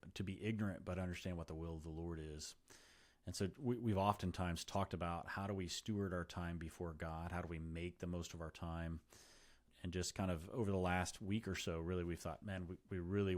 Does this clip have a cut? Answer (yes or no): yes